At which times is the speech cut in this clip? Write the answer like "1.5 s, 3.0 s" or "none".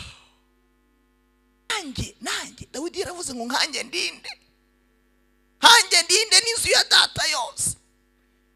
1.7 s

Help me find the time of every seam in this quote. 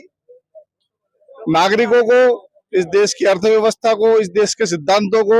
none

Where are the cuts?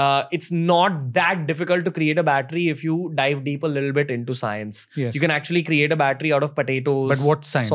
none

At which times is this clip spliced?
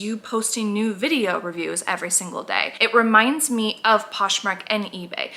2.7 s

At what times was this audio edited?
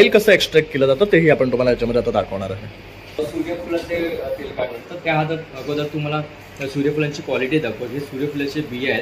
3.2 s

